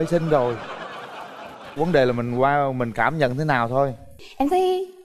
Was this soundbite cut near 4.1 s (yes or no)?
yes